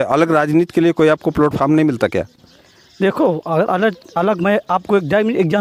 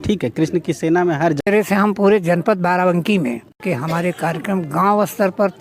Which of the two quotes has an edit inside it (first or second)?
second